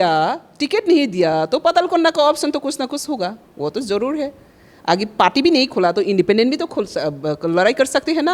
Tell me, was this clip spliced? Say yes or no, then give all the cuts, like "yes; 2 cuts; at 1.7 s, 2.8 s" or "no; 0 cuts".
no; 0 cuts